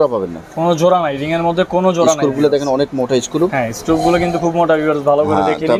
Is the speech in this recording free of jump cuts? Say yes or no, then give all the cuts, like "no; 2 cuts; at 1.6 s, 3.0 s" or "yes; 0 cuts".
yes; 0 cuts